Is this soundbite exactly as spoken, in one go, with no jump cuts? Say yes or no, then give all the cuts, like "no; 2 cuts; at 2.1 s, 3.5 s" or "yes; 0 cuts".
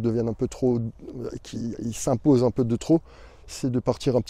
yes; 0 cuts